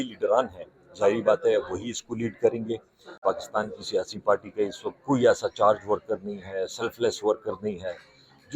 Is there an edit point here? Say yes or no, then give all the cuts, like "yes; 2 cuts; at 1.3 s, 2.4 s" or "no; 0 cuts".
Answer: yes; 1 cut; at 3.1 s